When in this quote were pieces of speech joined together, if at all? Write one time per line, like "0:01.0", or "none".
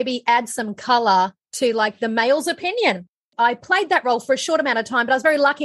0:03.2